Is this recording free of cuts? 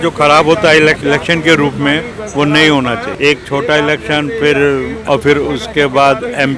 no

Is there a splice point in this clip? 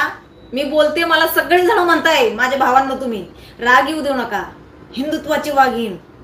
no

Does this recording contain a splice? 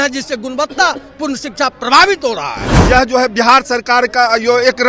yes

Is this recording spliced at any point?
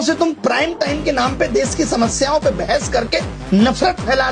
no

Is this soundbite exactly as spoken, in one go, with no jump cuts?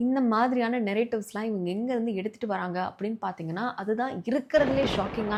yes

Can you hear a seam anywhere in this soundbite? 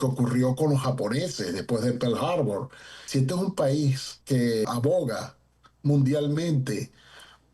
yes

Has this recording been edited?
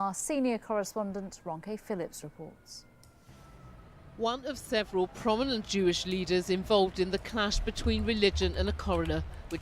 yes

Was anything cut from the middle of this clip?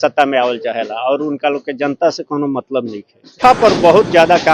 yes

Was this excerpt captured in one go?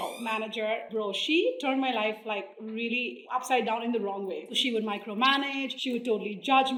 yes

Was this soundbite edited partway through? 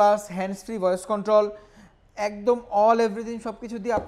no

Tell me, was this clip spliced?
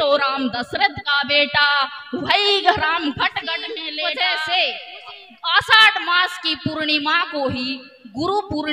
yes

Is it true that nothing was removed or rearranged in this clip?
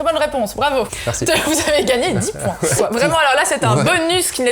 no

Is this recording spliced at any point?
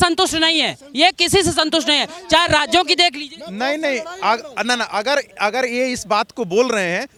no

